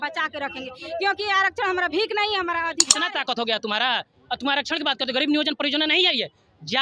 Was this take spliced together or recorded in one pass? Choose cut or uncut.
cut